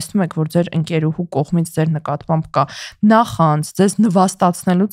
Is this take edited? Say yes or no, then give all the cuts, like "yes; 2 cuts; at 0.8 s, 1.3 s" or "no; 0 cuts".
no; 0 cuts